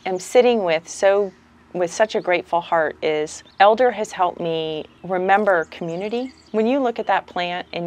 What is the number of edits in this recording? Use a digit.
3